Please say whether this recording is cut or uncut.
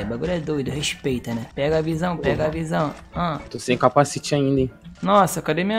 cut